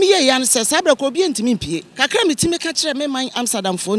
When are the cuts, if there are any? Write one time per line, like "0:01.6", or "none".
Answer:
0:01.9